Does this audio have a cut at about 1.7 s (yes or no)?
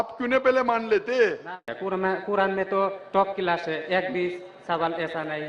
yes